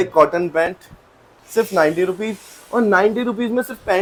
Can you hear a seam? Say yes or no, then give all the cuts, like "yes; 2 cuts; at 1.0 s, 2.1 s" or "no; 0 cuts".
no; 0 cuts